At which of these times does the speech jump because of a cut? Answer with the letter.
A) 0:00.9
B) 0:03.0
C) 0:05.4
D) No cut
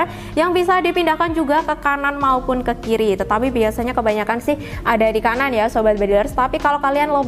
D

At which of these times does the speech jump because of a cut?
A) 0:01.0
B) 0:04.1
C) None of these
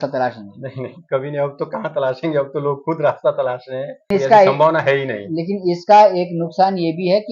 B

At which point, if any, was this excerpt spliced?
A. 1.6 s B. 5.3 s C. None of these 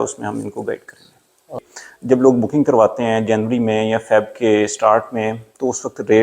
A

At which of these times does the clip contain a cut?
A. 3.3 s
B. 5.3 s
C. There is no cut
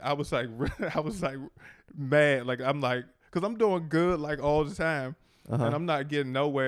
C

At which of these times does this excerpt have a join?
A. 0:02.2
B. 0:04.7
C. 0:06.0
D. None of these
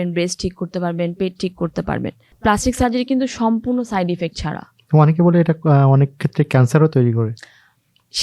A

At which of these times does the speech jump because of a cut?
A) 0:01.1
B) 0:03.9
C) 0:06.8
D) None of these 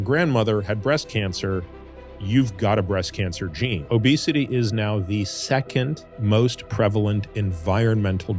B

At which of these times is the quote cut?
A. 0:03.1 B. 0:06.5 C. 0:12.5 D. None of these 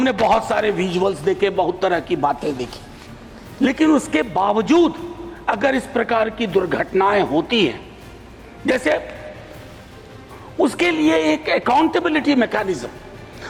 D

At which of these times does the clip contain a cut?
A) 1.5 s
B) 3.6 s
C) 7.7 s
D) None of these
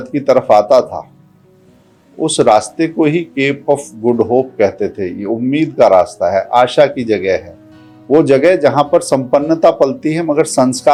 D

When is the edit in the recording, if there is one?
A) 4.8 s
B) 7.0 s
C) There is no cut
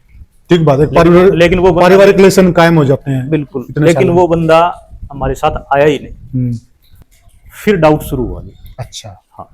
B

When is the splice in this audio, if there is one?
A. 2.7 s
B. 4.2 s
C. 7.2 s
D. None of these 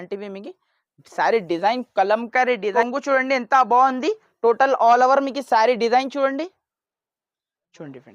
A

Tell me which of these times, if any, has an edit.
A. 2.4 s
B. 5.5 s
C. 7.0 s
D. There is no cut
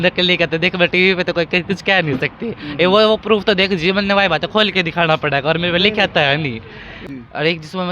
C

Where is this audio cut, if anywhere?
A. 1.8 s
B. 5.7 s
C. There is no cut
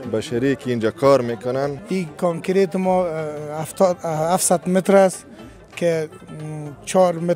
A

